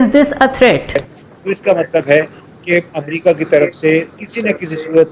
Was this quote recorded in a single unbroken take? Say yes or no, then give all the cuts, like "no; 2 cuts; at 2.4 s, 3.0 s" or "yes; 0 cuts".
no; 1 cut; at 1.0 s